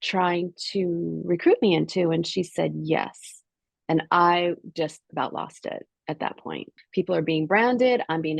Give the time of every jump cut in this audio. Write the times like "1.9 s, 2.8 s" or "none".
6.7 s